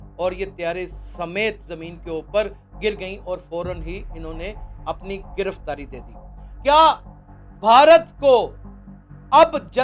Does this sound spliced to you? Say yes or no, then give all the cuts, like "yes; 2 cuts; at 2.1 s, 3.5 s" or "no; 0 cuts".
yes; 1 cut; at 6.5 s